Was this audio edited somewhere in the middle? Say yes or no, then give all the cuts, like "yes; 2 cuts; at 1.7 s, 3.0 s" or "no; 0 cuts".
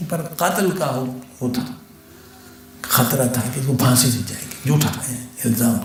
no; 0 cuts